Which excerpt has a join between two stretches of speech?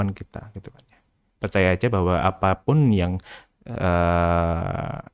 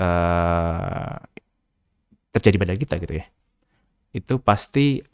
first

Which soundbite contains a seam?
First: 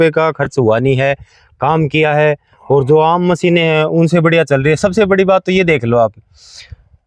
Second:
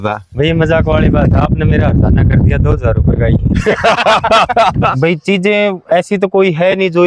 second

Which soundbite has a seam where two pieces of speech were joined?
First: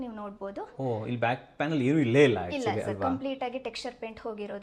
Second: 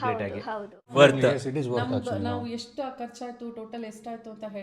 second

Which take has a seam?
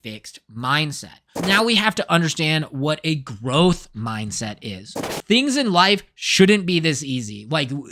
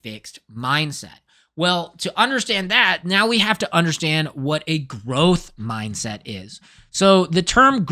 first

